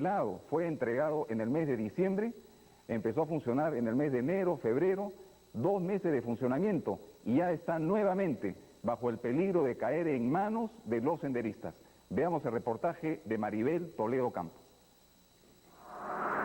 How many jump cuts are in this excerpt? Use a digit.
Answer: 1